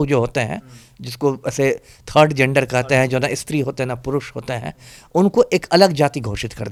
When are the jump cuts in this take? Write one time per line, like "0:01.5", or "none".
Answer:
none

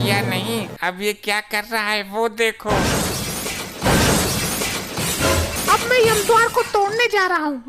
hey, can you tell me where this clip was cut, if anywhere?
0:05.5

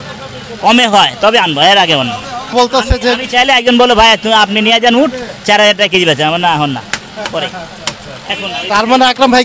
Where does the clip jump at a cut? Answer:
0:02.5

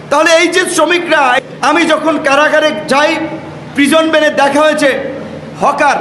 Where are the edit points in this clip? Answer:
0:01.4

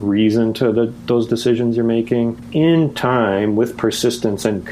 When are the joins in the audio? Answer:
0:02.4

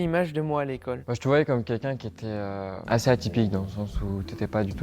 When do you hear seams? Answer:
0:01.1
0:02.8

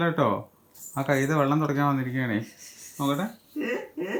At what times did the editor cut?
none

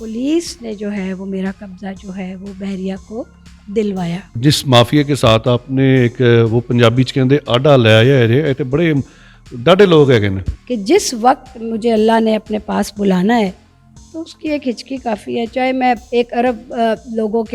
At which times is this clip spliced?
0:04.3
0:10.5
0:16.0

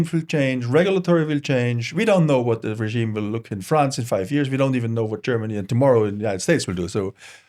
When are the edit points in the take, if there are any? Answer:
none

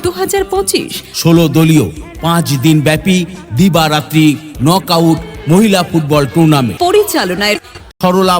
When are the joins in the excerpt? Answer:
0:01.0

